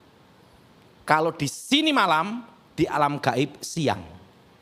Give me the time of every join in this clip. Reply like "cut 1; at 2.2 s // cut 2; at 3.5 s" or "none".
none